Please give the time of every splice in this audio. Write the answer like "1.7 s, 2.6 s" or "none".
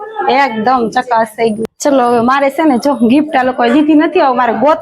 1.7 s